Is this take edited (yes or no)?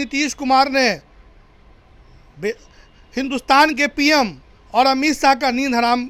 no